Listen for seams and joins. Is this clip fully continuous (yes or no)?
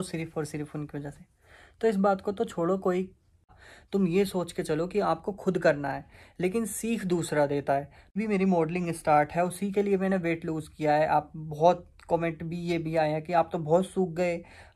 no